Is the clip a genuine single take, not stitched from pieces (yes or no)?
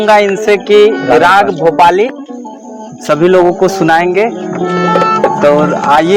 yes